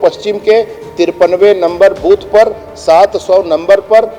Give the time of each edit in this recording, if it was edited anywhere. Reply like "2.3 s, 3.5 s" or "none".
none